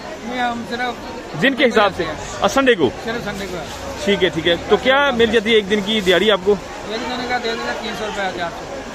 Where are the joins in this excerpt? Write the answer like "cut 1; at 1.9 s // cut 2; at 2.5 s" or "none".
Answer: none